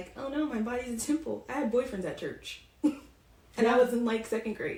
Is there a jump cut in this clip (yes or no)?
no